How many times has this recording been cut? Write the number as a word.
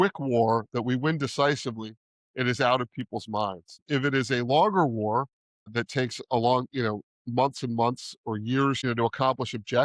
three